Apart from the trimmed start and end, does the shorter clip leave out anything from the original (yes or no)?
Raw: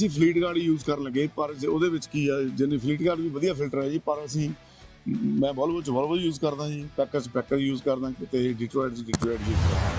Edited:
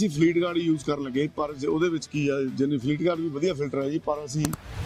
no